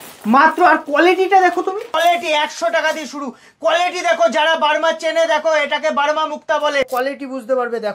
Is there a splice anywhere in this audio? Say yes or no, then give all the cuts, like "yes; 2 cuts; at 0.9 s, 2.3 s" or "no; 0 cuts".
yes; 2 cuts; at 1.9 s, 6.9 s